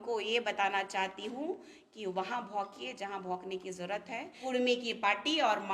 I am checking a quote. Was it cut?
yes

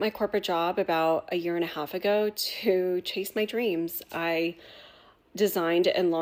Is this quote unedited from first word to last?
yes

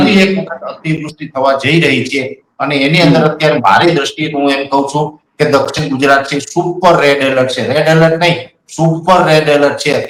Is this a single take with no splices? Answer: yes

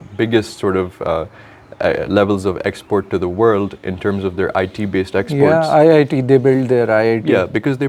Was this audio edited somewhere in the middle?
no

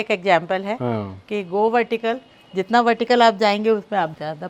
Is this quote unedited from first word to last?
yes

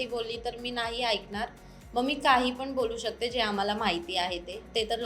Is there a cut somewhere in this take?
no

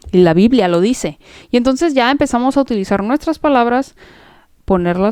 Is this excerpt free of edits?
yes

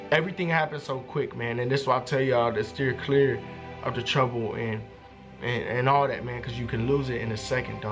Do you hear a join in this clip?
no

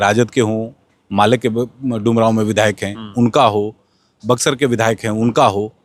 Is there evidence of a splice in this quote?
no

